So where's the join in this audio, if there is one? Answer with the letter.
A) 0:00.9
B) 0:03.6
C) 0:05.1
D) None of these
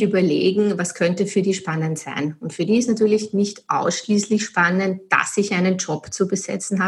D